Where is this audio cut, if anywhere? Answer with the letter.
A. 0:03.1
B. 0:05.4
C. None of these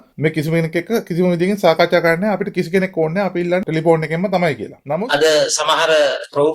C